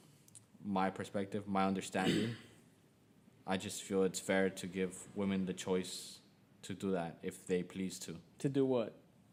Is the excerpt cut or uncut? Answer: uncut